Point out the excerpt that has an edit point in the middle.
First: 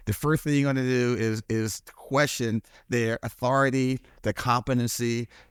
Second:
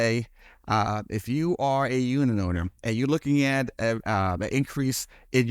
second; 1 cut; at 4.0 s

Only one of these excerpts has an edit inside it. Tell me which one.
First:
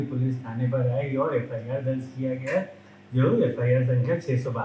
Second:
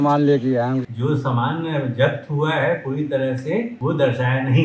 second; 2 cuts; at 0.9 s, 3.7 s

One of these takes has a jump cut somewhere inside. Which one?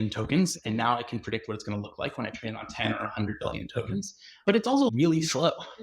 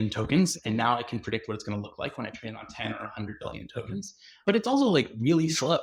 first; 1 cut; at 4.9 s

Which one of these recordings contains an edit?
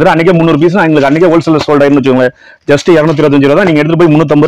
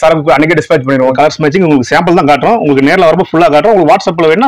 second; 1 cut; at 1.1 s

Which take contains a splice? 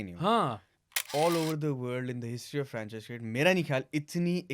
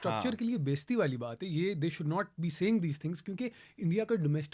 first; 1 cut; at 1.0 s

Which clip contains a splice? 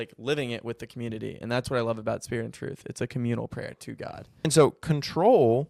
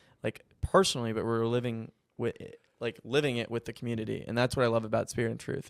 first; 1 cut; at 4.4 s

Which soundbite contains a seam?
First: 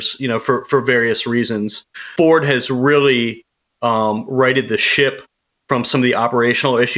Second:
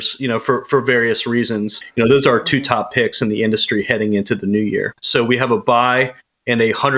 second; 2 cuts; at 1.8 s, 5.0 s

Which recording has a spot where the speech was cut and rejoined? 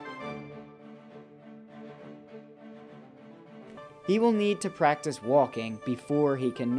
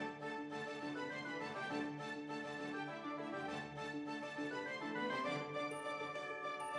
second; 1 cut; at 3.1 s

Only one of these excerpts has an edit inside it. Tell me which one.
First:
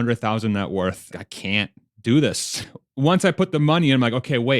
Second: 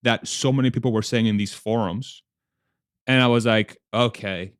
first; 2 cuts; at 1.1 s, 2.6 s

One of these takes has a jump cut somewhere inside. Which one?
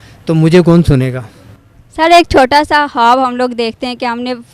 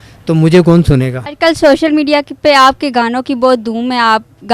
second; 1 cut; at 1.2 s

